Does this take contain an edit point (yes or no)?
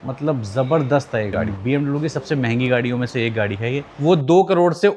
yes